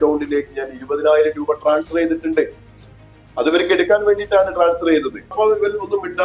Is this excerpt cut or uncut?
cut